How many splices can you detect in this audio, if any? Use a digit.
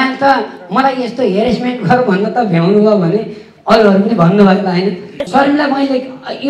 1